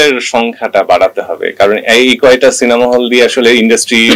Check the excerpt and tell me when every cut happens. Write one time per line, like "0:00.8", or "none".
none